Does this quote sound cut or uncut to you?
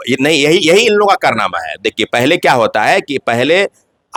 uncut